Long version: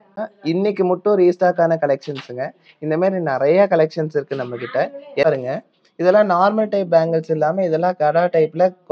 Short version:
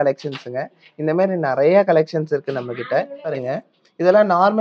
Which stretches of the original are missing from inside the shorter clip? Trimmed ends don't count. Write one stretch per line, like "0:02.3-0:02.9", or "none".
0:05.2-0:05.3